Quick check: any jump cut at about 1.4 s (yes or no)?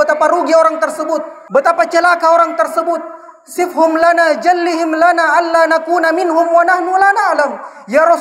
yes